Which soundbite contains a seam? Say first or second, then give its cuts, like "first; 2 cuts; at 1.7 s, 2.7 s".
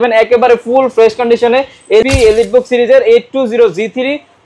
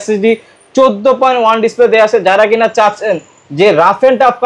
first; 1 cut; at 2.0 s